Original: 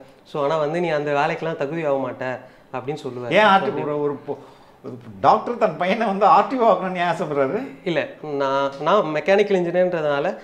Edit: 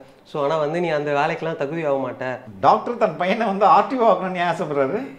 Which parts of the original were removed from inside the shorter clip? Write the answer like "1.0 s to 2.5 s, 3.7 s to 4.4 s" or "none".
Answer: 2.5 s to 5.1 s